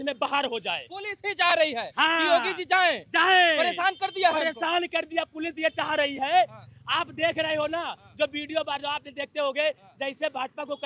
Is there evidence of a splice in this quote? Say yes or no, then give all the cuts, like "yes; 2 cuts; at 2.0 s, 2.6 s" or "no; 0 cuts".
no; 0 cuts